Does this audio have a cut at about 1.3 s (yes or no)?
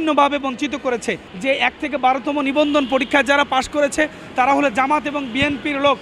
yes